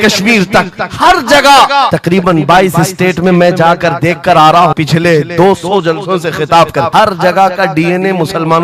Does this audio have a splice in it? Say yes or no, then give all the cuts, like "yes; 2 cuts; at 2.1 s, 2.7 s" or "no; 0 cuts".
yes; 3 cuts; at 1.9 s, 4.7 s, 6.9 s